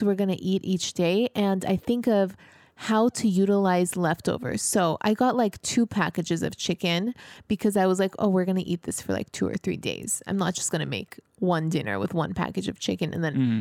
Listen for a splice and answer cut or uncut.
uncut